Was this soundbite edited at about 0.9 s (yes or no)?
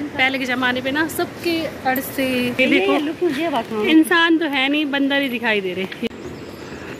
no